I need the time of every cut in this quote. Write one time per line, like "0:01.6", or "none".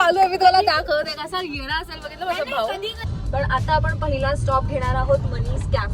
0:03.1

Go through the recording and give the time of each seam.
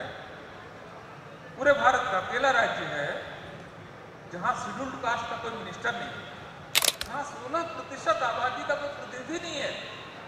0:06.9

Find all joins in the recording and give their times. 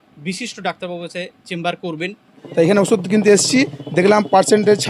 0:02.4

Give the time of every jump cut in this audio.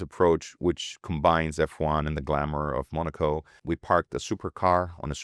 0:03.5

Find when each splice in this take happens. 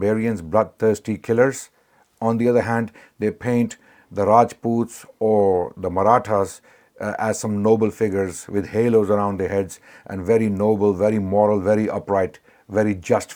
none

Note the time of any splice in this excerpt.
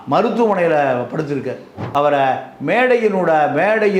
0:01.7

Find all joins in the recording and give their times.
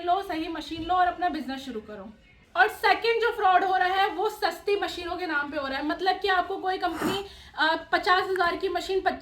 none

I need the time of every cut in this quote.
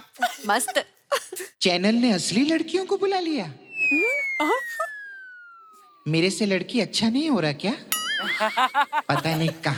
none

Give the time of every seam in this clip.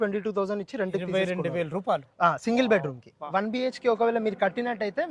0:03.3

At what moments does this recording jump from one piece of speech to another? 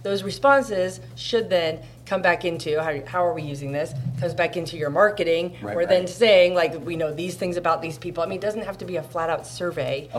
none

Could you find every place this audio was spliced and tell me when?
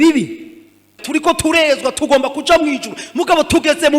0:00.9

